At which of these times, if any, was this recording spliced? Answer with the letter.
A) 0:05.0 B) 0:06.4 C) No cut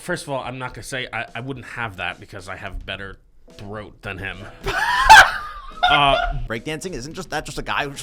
B